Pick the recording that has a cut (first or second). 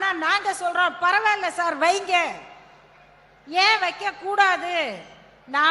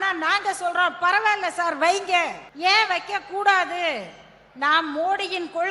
second